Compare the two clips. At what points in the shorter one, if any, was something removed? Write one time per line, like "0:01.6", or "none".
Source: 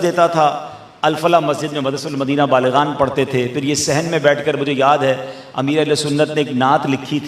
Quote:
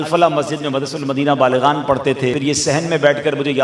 0:02.4